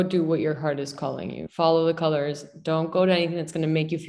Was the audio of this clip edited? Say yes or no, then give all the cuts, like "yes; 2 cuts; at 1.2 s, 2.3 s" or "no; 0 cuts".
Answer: no; 0 cuts